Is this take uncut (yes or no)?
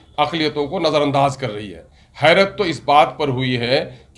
yes